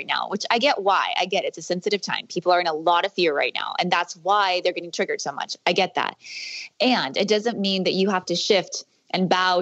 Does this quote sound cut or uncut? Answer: uncut